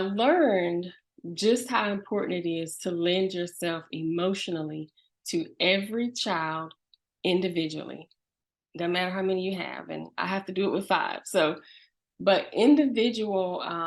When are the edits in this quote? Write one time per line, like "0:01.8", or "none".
0:01.0